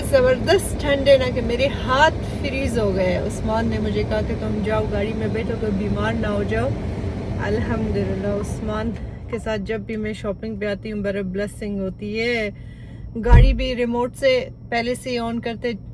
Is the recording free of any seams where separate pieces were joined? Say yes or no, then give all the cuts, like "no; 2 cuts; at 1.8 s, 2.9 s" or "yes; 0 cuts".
yes; 0 cuts